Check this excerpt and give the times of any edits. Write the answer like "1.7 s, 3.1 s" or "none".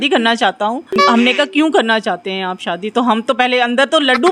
1.0 s